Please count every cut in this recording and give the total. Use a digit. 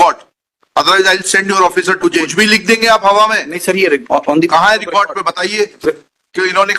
1